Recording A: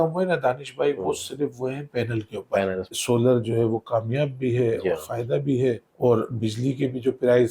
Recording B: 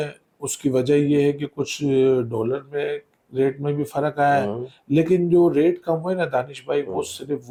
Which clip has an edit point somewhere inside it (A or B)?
A